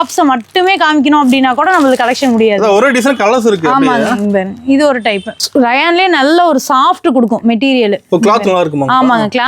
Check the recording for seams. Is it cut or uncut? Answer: cut